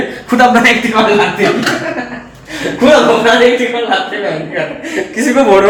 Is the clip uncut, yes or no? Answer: yes